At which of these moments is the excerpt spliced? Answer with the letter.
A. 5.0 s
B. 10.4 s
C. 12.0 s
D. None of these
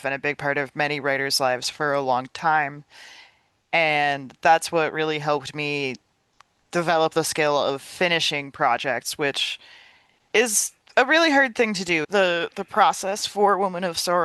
C